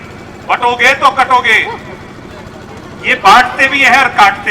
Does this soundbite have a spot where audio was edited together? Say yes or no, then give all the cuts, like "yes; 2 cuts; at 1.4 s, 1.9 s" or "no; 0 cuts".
no; 0 cuts